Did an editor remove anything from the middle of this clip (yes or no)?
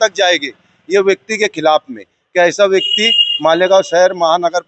no